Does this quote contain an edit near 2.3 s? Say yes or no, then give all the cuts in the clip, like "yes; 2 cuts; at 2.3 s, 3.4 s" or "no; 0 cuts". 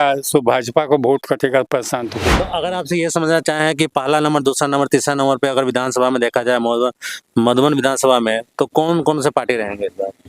yes; 1 cut; at 2.3 s